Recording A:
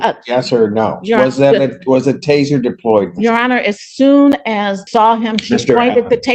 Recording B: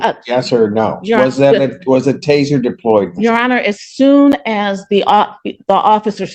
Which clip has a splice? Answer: A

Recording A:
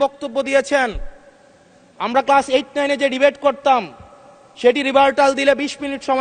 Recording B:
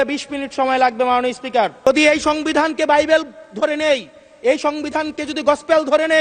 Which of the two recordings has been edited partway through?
B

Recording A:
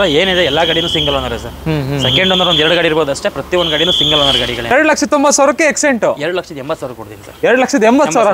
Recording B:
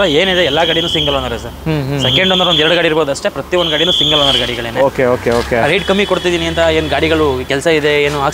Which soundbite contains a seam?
A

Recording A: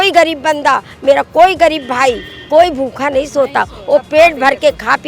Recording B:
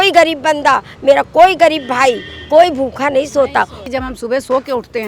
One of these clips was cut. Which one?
B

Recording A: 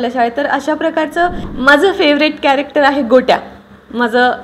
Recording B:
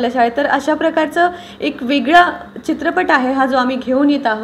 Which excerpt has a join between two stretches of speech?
A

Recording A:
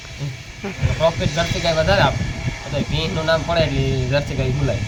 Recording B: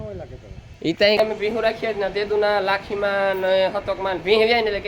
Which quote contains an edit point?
B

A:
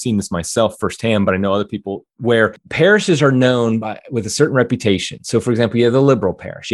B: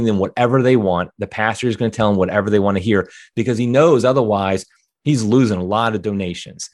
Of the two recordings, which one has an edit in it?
A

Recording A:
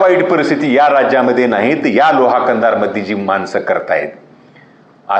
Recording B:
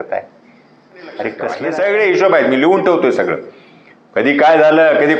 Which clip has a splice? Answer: B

